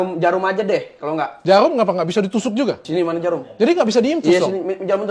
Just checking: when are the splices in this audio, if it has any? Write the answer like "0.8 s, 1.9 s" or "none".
1.3 s, 2.8 s